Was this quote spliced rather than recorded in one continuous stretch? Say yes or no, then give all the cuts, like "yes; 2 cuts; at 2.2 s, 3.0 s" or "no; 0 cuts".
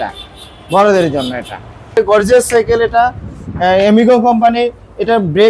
yes; 1 cut; at 2.0 s